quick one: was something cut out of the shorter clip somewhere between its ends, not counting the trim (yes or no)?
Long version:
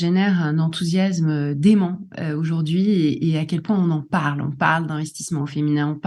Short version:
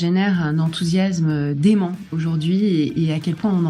yes